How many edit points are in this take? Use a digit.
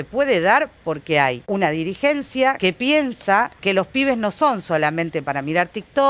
3